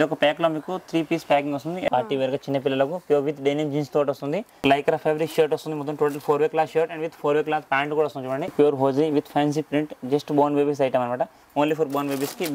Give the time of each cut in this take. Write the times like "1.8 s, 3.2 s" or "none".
1.9 s, 4.6 s, 8.5 s